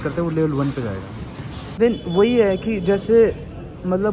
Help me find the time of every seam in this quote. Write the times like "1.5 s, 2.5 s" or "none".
1.8 s